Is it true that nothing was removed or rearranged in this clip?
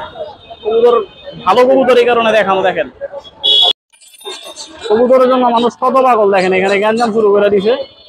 no; 1 cut; at 3.8 s

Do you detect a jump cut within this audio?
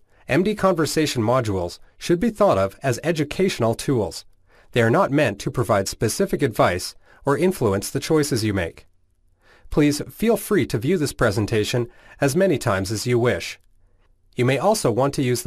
no; 0 cuts

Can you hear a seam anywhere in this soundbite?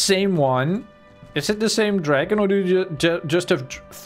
no; 0 cuts

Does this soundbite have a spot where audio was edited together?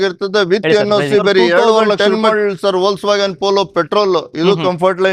yes; 1 cut; at 2.0 s

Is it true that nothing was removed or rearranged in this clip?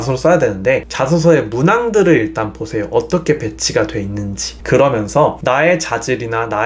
no; 1 cut; at 0.9 s

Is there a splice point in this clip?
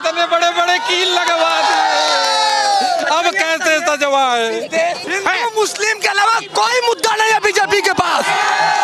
yes; 1 cut; at 5.1 s

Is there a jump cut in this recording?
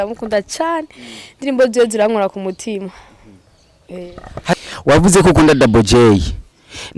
yes; 1 cut; at 4.5 s

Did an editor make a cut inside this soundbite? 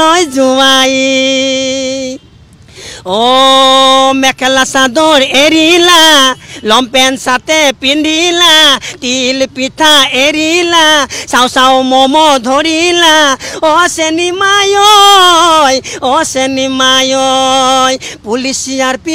no; 0 cuts

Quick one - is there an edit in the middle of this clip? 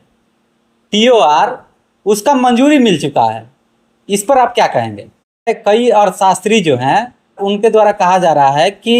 yes; 2 cuts; at 5.5 s, 7.4 s

